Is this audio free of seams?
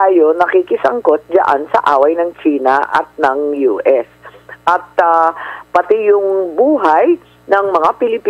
yes; 0 cuts

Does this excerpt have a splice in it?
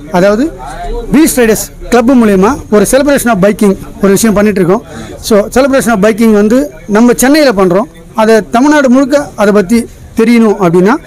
no; 0 cuts

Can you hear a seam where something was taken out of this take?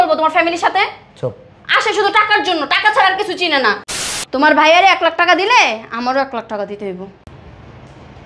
yes; 1 cut; at 4.2 s

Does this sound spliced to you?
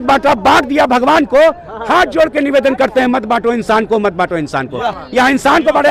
no; 0 cuts

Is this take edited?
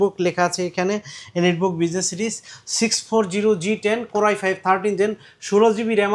no; 0 cuts

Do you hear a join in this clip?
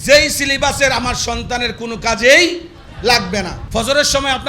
yes; 1 cut; at 3.6 s

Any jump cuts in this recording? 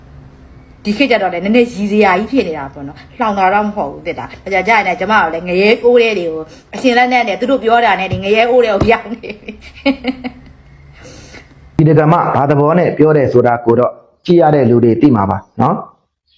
yes; 1 cut; at 11.8 s

